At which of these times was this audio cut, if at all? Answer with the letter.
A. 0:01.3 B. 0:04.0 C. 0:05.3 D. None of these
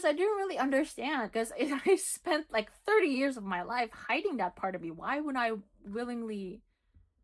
A